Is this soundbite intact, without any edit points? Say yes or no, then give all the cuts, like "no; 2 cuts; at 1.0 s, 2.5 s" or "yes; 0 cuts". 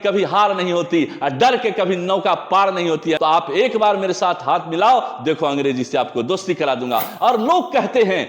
no; 1 cut; at 3.2 s